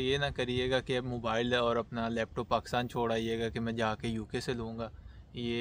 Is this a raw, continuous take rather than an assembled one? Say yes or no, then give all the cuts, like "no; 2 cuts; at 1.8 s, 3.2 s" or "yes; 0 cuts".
yes; 0 cuts